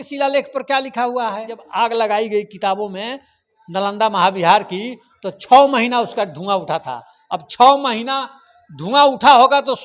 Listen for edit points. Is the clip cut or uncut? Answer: cut